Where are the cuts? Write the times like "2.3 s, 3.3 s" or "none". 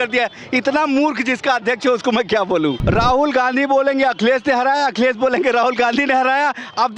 2.8 s

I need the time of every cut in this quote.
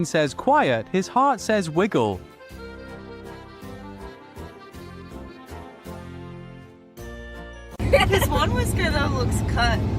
7.8 s

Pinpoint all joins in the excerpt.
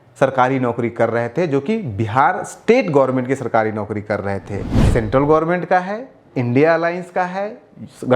4.7 s

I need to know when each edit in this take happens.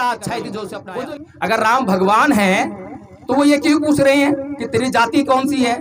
0.9 s

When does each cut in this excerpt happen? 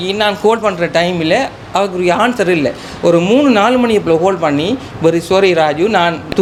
none

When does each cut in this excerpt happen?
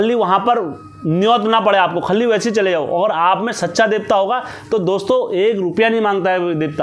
none

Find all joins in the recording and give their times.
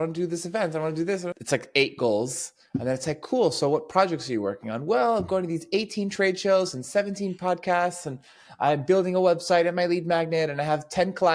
1.4 s

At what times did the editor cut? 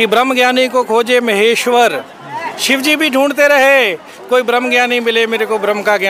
none

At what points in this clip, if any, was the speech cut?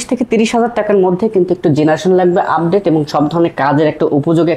none

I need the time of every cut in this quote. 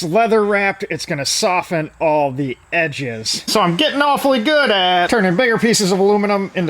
3.4 s

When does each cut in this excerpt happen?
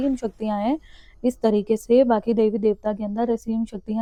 none

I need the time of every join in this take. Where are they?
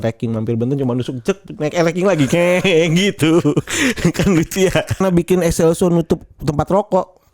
5.0 s

